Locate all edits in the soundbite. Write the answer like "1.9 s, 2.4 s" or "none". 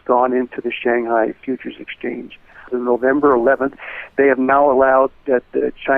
2.7 s